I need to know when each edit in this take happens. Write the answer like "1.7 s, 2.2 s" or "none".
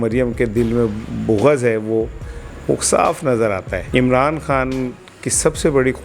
3.8 s